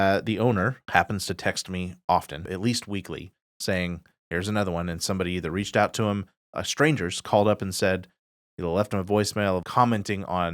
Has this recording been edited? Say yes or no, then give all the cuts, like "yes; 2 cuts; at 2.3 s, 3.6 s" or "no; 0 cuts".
yes; 3 cuts; at 0.8 s, 2.5 s, 9.6 s